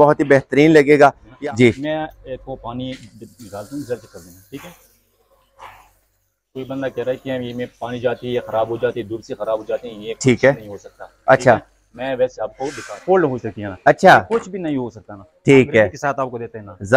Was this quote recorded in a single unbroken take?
no; 2 cuts; at 1.3 s, 12.9 s

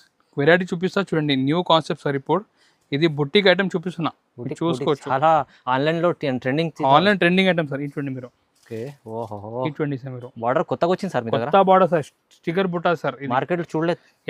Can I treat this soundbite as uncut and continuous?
yes; 0 cuts

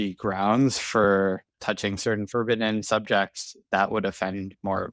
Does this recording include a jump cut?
yes; 1 cut; at 1.6 s

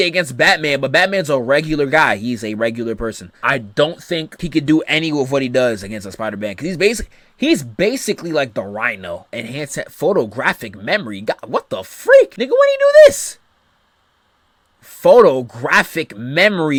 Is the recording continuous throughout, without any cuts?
yes; 0 cuts

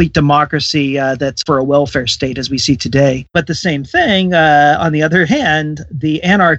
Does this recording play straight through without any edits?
no; 2 cuts; at 1.4 s, 3.3 s

